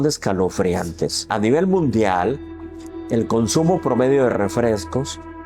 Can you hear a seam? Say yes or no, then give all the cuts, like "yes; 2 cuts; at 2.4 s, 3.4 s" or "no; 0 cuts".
yes; 1 cut; at 1.3 s